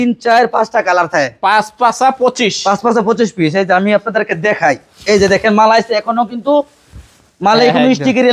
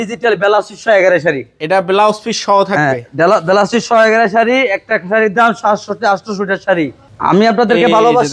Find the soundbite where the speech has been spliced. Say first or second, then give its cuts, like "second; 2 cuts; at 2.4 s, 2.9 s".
second; 1 cut; at 7.0 s